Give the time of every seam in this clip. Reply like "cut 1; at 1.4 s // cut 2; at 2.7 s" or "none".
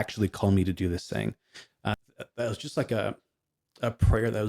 cut 1; at 1.9 s